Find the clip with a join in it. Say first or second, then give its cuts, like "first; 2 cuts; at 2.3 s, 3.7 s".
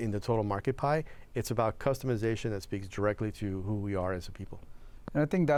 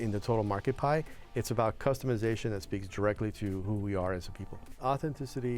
second; 1 cut; at 4.6 s